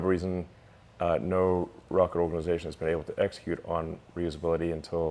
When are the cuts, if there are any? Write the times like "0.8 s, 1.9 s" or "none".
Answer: none